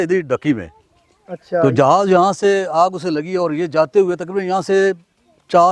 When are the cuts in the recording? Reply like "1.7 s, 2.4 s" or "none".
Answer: none